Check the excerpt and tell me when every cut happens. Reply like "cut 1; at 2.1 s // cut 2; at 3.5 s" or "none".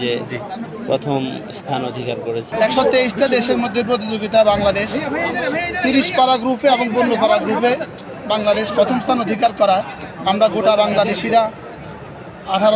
cut 1; at 2.5 s